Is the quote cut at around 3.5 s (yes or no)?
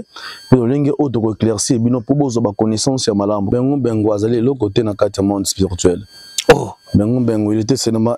yes